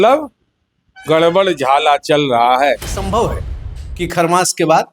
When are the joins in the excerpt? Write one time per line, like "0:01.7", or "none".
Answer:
0:02.9

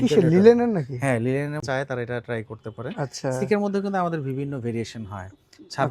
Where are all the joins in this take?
0:01.6

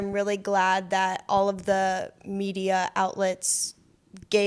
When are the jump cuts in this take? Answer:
none

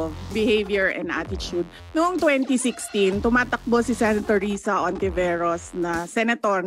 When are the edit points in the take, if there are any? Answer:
0:01.8

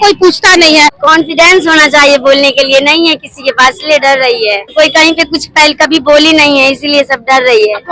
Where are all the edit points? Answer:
0:01.0
0:04.7

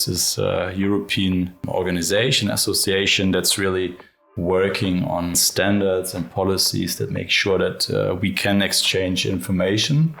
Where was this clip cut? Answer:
0:01.6
0:05.4

